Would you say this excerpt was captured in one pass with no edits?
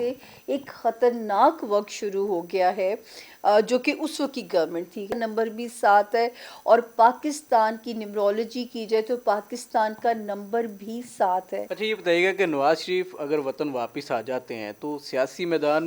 no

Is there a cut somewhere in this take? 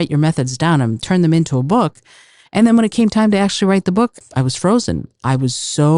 yes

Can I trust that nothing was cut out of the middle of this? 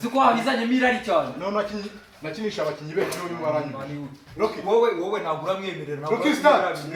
yes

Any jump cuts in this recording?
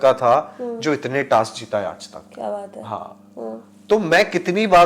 no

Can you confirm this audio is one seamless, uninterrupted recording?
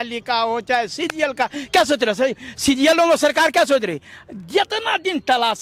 yes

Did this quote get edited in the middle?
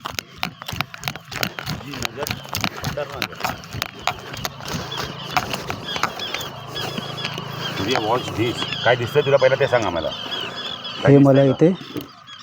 no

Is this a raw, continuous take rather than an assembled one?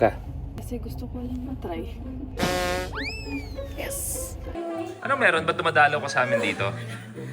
no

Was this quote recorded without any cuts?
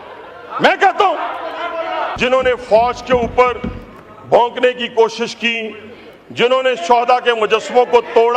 no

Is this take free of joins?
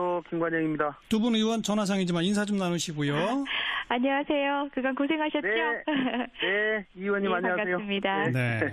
yes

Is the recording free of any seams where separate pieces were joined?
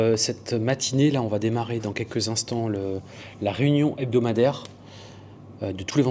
yes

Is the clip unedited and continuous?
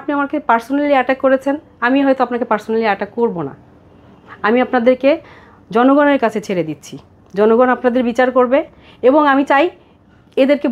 yes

